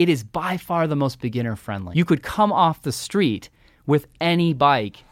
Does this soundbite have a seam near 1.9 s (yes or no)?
yes